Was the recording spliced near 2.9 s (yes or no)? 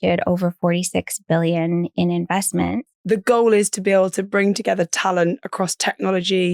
yes